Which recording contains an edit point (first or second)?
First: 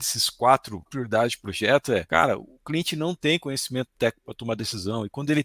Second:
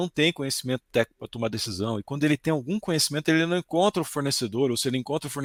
first